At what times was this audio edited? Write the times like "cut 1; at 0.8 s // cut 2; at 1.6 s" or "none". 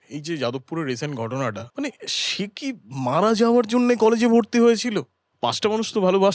cut 1; at 1.6 s // cut 2; at 5.2 s